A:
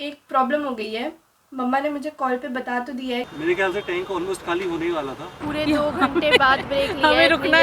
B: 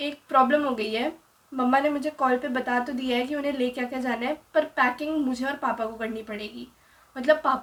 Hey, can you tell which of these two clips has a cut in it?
A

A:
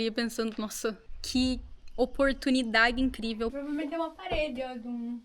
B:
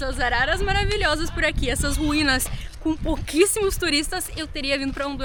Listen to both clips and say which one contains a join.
A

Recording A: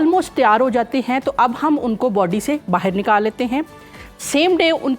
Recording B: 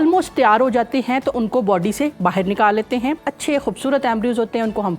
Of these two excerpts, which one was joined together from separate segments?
B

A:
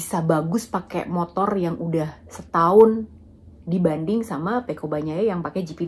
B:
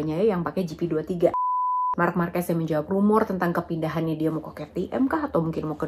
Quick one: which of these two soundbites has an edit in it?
B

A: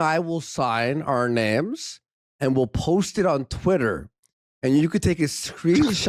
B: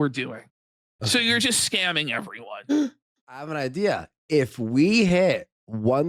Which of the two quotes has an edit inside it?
B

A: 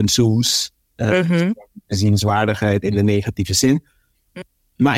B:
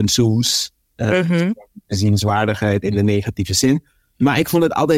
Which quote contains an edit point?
B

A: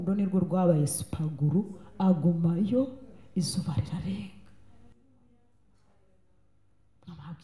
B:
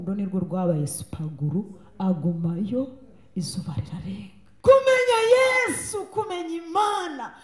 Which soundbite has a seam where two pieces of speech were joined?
B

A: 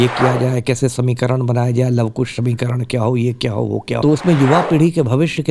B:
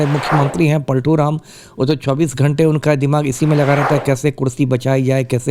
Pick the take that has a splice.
A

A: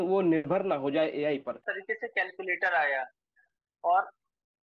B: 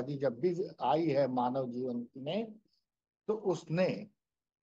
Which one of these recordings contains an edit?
A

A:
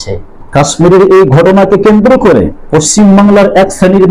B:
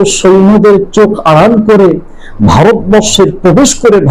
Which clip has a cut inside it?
A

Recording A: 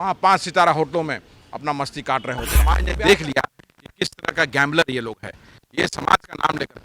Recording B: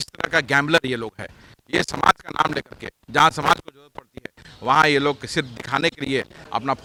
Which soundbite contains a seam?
A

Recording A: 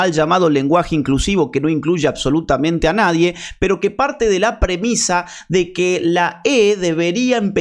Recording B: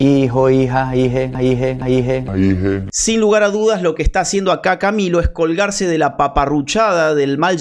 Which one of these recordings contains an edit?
B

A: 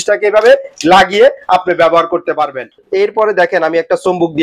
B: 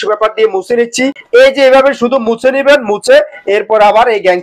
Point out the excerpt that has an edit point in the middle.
A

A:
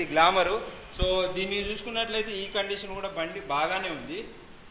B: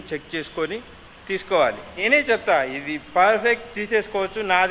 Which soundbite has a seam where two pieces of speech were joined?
B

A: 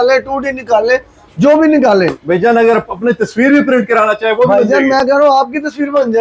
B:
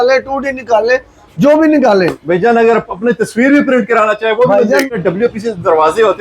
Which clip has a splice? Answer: B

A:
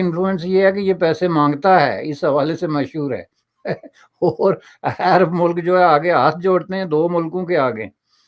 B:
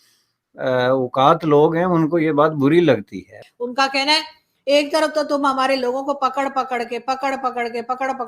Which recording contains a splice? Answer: B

